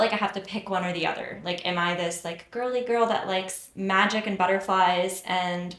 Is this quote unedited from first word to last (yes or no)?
yes